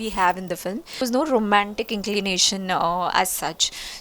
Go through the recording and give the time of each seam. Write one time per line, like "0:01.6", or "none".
0:01.0